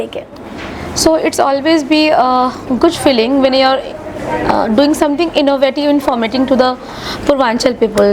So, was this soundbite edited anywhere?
no; 0 cuts

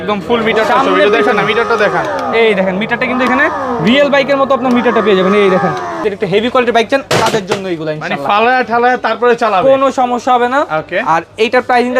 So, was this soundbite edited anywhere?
yes; 1 cut; at 5.9 s

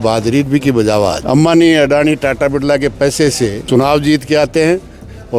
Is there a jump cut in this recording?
yes; 2 cuts; at 1.2 s, 3.6 s

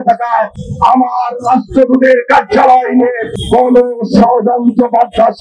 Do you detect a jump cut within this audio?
no; 0 cuts

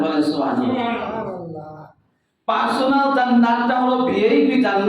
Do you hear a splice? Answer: no; 0 cuts

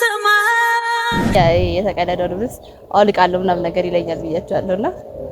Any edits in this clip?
yes; 1 cut; at 1.3 s

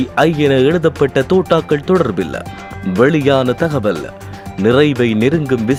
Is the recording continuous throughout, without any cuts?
yes; 0 cuts

